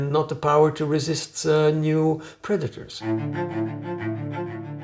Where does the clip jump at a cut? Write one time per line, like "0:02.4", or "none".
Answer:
0:03.0